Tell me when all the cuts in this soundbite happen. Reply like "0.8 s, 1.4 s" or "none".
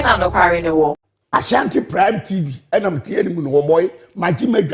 1.0 s